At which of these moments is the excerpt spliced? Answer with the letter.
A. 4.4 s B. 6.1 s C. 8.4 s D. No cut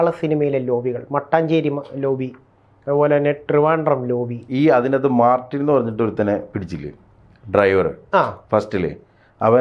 A